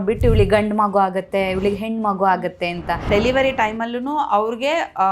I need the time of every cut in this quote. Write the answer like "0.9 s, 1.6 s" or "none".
3.1 s